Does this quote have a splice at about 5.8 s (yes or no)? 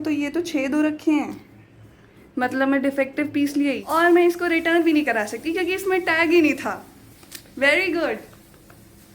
no